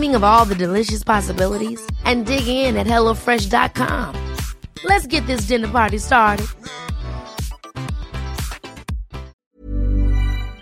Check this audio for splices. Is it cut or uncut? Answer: cut